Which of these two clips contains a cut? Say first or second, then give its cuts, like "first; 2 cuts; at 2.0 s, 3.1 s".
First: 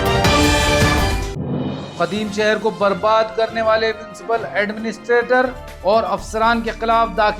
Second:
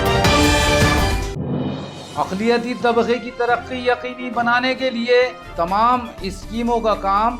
second; 1 cut; at 1.7 s